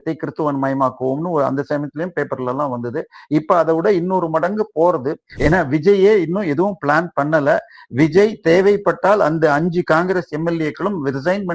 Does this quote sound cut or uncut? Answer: cut